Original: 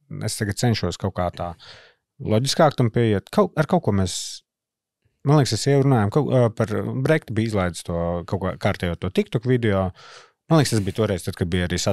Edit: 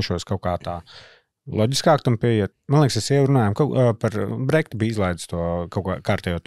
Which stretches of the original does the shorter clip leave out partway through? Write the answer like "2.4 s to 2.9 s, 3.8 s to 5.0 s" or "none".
3.3 s to 5.1 s